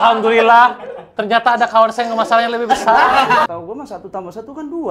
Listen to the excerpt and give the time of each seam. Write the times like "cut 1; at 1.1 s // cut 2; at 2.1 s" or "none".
cut 1; at 3.5 s